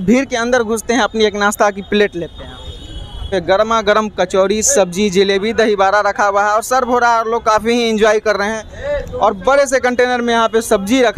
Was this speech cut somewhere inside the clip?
no; 0 cuts

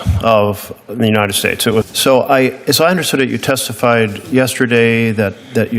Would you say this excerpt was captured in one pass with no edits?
no; 1 cut; at 1.9 s

